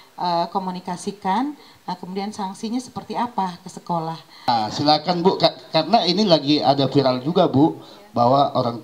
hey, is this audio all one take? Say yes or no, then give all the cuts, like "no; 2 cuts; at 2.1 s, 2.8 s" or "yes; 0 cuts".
no; 1 cut; at 4.5 s